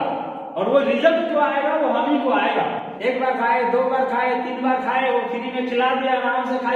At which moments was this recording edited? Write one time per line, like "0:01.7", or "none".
0:02.9